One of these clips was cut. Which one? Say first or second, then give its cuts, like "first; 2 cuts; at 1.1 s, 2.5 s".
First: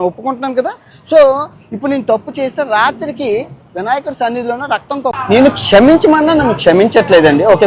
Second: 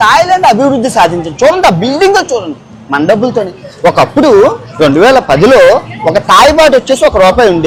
first; 1 cut; at 5.2 s